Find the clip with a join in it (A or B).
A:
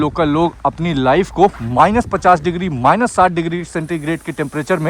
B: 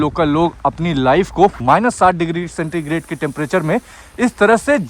B